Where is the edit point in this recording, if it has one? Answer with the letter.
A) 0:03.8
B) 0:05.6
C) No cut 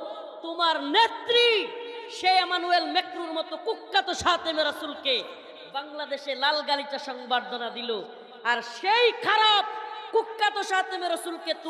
C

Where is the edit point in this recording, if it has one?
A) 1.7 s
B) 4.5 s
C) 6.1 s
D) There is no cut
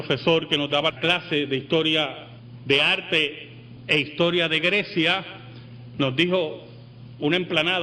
A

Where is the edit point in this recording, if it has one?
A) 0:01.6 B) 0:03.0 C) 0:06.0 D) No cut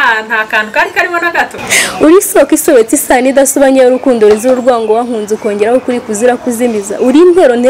A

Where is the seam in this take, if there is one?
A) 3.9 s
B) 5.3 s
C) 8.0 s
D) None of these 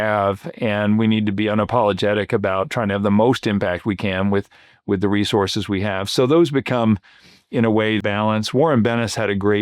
C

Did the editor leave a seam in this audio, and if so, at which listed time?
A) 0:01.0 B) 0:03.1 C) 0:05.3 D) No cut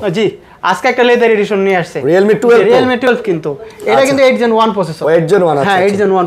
B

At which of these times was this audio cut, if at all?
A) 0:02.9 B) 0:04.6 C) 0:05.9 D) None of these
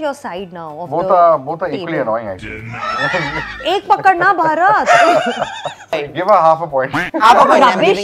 C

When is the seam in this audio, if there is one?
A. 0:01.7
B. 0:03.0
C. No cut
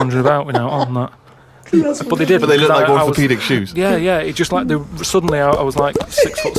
A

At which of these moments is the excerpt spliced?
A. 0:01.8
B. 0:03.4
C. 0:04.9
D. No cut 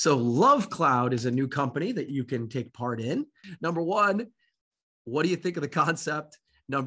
B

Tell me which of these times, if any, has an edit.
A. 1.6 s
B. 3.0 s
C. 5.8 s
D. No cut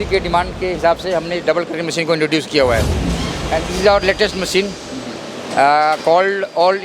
B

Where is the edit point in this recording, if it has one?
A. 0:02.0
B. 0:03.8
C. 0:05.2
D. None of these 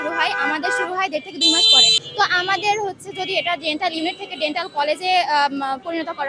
A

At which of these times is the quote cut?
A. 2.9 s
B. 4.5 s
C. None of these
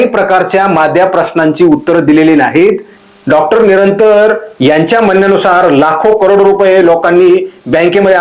A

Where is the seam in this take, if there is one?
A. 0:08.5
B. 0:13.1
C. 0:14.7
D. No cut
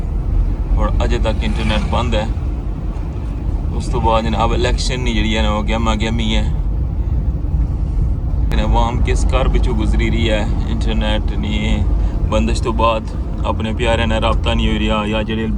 A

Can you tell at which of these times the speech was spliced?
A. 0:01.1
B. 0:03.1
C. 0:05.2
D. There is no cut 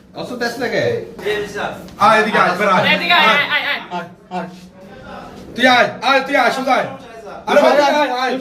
A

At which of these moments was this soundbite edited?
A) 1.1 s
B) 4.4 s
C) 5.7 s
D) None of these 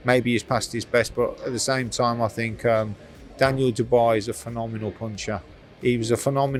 D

